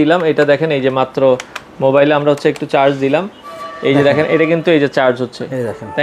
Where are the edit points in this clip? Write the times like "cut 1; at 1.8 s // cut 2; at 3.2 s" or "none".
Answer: none